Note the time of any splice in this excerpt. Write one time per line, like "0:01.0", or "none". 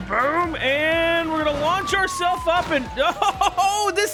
none